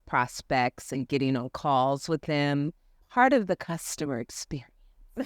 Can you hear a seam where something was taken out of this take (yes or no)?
yes